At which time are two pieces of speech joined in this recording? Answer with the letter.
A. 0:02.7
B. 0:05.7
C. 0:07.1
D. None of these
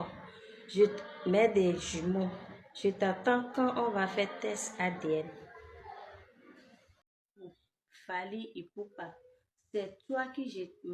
C